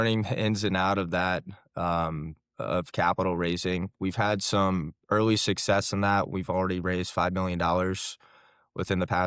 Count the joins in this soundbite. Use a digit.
1